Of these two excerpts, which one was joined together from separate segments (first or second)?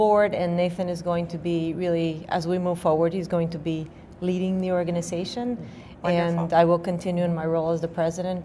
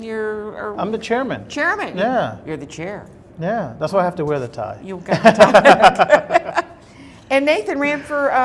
second